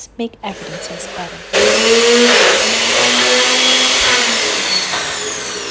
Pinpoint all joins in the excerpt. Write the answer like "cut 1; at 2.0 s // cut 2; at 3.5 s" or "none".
none